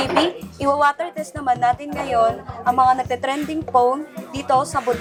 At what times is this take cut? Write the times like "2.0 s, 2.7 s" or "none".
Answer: none